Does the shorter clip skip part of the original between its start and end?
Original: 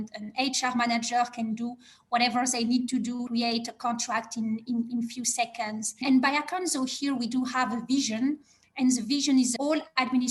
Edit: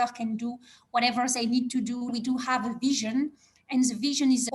yes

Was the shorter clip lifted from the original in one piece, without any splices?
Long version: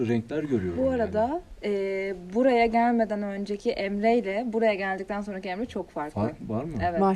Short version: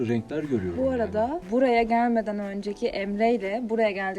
no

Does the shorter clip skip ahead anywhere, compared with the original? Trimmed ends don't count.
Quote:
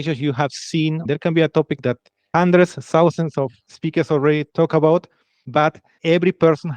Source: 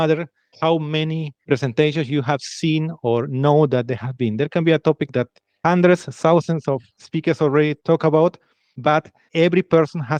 yes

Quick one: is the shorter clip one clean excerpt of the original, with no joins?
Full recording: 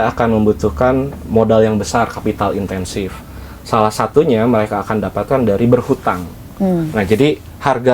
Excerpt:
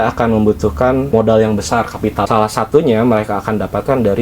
no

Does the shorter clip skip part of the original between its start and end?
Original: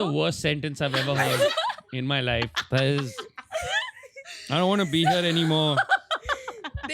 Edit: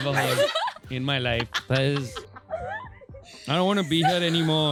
no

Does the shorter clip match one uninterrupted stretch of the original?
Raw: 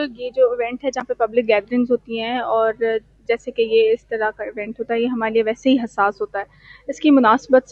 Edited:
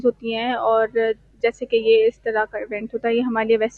yes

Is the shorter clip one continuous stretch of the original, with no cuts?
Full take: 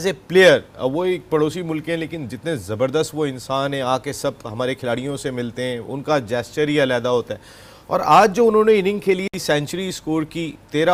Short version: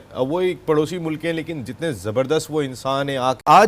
no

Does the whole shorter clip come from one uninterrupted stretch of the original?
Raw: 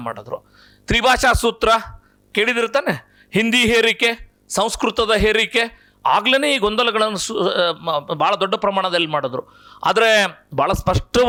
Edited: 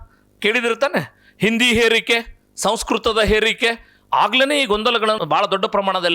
no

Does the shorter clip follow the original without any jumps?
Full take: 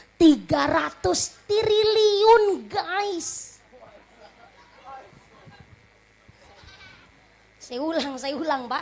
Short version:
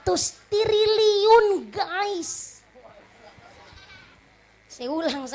no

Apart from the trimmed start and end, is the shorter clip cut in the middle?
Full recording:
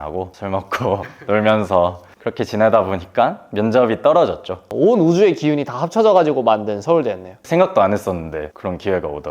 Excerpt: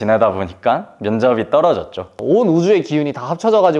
no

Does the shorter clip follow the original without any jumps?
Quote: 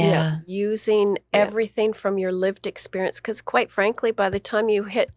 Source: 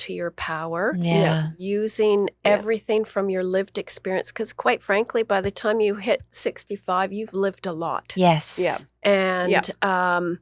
yes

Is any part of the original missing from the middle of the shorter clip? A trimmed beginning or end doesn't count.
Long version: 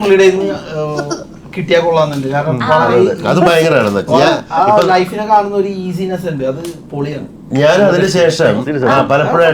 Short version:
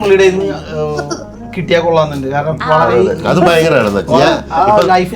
no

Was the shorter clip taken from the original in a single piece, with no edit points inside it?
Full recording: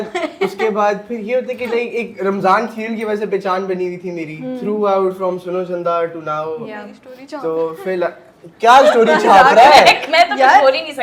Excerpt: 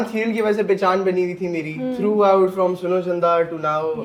yes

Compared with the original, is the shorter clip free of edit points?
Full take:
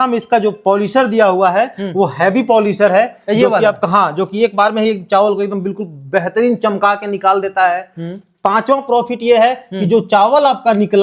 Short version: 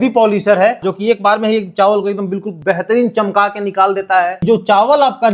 no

